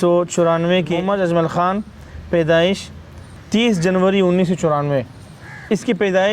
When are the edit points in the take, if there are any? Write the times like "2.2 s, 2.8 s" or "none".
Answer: 1.0 s, 3.3 s